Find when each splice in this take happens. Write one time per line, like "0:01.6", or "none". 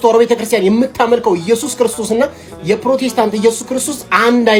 none